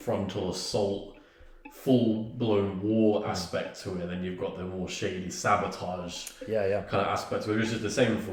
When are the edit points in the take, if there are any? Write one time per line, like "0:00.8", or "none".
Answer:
none